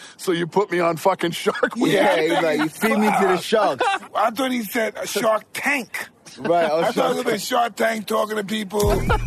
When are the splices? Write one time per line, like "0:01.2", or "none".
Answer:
0:04.0